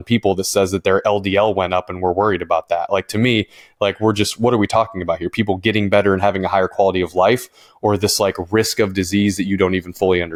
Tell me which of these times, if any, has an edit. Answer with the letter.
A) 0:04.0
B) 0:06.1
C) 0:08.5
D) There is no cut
D